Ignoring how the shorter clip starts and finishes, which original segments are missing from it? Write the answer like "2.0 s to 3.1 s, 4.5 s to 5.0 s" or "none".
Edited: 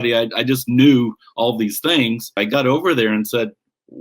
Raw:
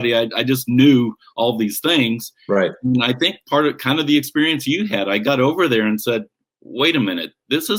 2.3 s to 5.1 s